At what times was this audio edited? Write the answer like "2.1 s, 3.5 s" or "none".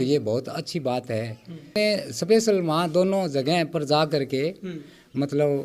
1.8 s